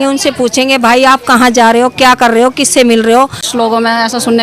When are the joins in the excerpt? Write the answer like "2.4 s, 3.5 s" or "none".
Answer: 3.5 s